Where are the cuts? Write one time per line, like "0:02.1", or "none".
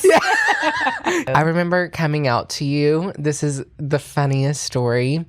0:01.3